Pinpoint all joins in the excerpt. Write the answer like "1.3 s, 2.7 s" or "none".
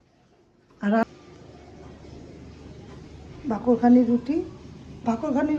1.0 s